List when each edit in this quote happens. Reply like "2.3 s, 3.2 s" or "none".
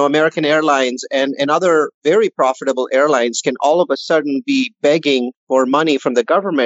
5.4 s